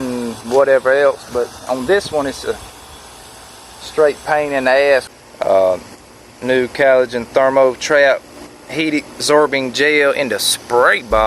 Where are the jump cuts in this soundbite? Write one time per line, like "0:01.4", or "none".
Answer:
0:05.1